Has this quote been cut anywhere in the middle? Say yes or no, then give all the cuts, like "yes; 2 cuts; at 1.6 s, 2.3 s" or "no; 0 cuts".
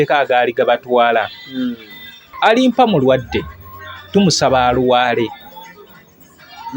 yes; 1 cut; at 2.3 s